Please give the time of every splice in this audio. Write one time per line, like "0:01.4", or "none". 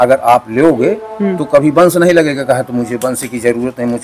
none